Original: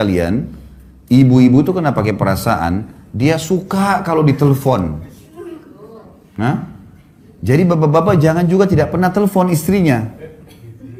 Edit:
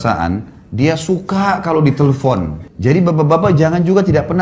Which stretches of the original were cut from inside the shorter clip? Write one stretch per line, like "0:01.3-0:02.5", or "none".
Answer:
0:05.0-0:07.3